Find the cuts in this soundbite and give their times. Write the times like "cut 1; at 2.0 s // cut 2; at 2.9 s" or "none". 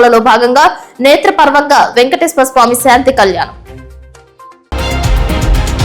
cut 1; at 4.7 s